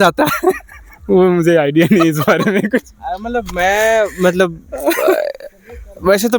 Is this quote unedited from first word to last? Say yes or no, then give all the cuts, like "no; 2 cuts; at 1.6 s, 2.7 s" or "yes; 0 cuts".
yes; 0 cuts